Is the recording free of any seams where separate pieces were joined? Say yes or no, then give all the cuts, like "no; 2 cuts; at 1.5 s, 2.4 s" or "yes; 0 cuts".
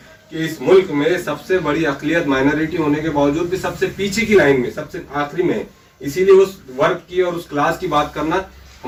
yes; 0 cuts